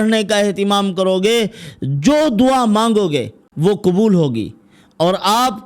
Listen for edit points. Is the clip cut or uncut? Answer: cut